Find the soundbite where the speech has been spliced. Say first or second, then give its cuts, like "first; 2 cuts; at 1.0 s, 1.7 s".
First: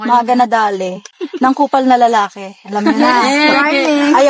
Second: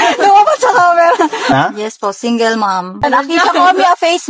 second; 2 cuts; at 1.5 s, 3.0 s